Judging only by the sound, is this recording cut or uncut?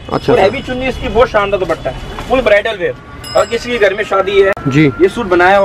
uncut